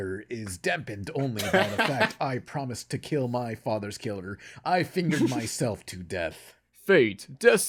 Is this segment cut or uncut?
uncut